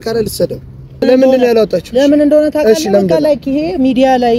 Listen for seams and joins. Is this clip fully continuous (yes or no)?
no